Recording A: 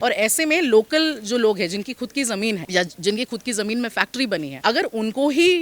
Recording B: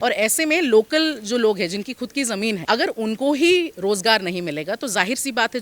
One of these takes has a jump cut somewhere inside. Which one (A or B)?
B